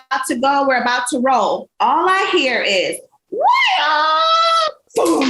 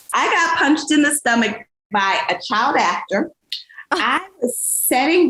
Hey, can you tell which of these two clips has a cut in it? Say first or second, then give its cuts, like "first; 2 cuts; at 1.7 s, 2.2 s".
first; 1 cut; at 1.7 s